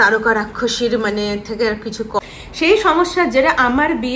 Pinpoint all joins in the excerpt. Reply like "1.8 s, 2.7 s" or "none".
2.2 s